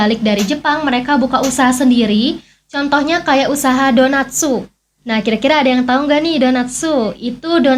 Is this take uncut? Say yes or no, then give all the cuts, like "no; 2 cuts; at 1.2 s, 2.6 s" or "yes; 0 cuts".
yes; 0 cuts